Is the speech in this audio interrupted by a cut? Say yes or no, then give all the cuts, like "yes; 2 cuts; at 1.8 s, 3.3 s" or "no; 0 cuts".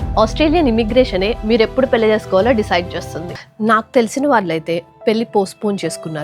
no; 0 cuts